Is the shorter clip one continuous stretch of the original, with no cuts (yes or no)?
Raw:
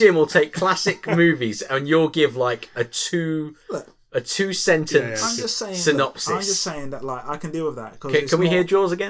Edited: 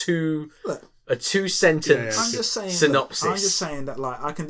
yes